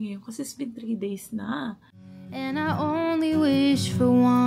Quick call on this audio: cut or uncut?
cut